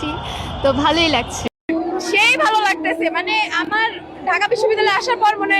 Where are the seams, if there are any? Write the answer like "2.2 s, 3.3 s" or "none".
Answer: 1.5 s